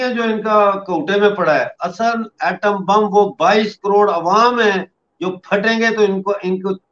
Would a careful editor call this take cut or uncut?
uncut